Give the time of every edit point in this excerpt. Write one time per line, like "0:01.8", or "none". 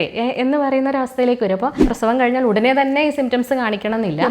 0:01.9